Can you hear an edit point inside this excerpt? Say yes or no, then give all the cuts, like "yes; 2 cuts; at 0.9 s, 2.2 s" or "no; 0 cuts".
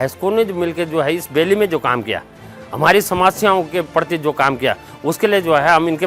no; 0 cuts